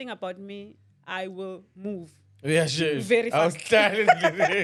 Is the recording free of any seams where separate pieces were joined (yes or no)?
yes